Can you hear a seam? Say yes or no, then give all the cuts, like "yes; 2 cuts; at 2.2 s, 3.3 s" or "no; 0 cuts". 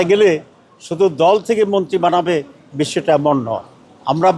no; 0 cuts